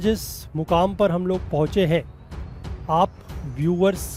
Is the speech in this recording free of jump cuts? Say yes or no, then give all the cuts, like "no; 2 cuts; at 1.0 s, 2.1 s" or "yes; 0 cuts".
yes; 0 cuts